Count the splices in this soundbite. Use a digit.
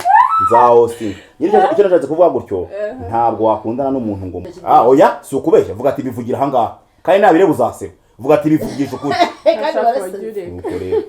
1